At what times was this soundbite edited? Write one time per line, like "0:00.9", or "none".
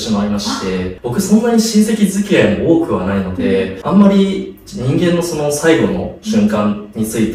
none